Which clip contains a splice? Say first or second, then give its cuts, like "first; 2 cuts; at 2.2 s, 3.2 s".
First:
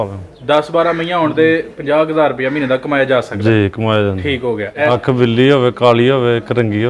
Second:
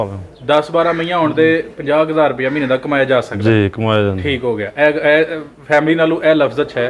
first; 1 cut; at 4.9 s